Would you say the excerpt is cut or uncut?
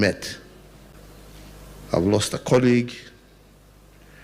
cut